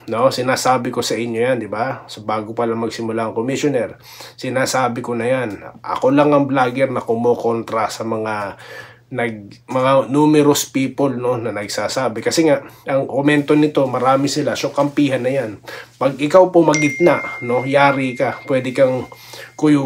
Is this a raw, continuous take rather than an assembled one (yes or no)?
yes